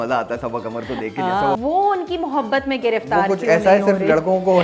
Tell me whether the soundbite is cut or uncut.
cut